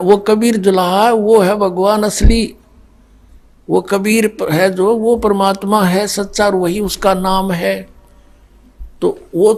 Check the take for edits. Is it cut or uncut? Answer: uncut